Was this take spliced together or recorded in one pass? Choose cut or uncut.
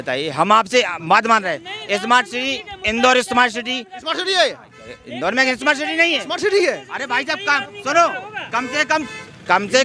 uncut